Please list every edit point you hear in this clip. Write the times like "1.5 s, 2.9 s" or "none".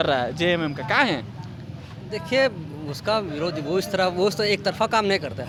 none